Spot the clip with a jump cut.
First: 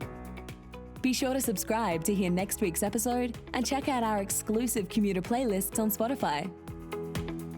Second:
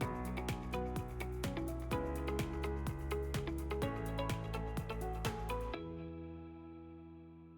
first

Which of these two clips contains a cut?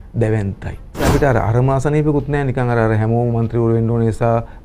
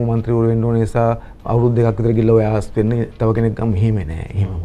first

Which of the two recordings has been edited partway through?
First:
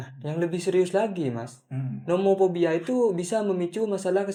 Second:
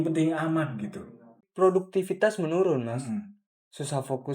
second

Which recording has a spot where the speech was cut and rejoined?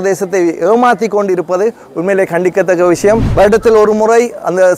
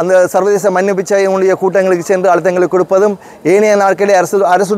first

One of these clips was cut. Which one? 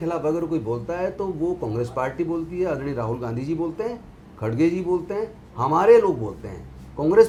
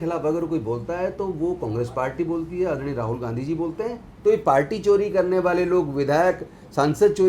second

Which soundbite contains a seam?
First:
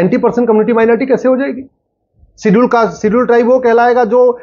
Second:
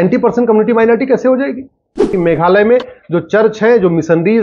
second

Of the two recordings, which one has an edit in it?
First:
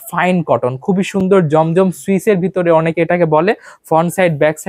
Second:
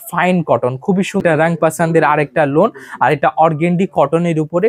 second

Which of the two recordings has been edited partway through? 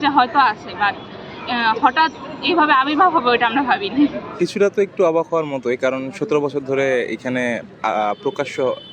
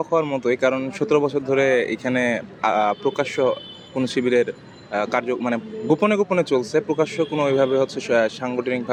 first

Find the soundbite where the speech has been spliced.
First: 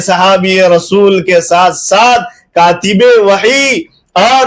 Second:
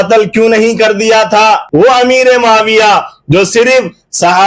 second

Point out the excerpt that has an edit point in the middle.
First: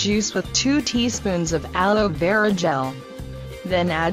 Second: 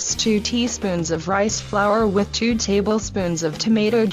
second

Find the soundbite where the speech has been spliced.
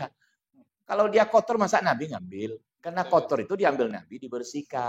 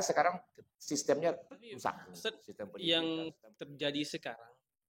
second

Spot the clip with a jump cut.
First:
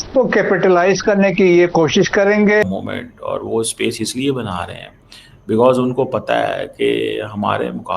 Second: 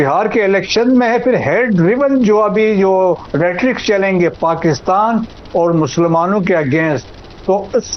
first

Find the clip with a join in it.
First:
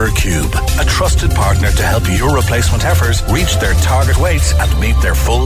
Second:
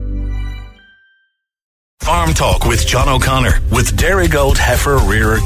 second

